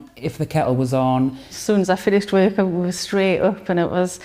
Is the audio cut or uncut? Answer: cut